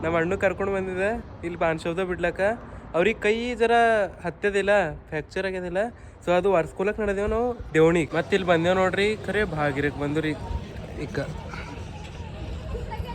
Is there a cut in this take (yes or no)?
yes